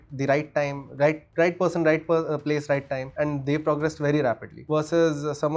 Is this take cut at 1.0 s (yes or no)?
no